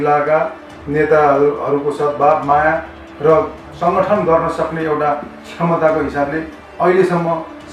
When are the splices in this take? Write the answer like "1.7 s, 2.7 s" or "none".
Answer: none